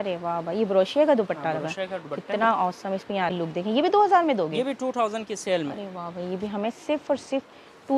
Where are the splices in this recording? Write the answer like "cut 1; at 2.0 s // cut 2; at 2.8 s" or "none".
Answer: cut 1; at 3.3 s